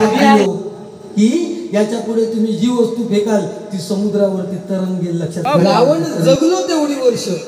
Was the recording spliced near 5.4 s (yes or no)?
yes